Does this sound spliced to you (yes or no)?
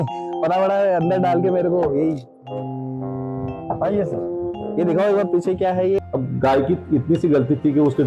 yes